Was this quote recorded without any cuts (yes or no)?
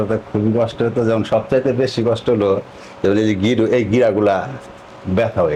yes